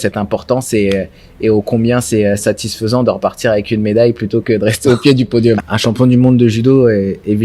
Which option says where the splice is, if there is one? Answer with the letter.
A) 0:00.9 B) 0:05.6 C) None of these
B